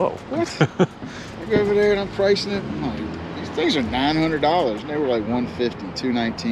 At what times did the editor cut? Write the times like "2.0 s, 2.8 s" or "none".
none